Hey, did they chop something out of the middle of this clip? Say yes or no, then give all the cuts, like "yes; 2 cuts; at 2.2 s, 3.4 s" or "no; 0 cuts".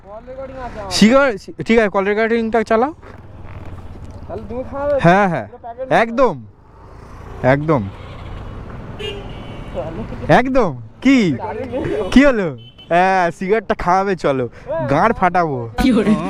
no; 0 cuts